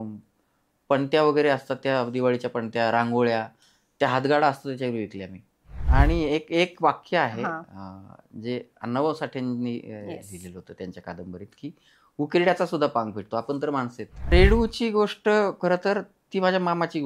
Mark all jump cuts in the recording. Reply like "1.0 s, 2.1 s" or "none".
5.8 s, 14.2 s

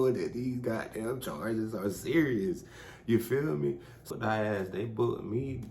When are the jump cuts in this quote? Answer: 4.1 s

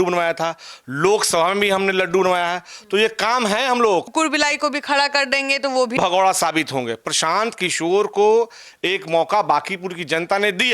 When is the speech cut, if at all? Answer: 4.1 s, 6.0 s

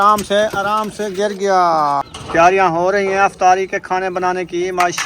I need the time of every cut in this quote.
2.0 s

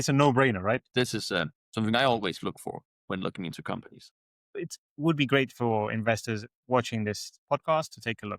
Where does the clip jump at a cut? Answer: 0.9 s, 4.6 s

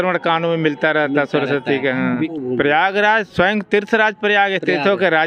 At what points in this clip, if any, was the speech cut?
2.3 s

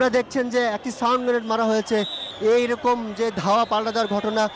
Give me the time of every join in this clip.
2.2 s

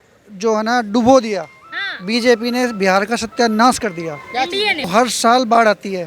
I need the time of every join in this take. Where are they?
4.9 s

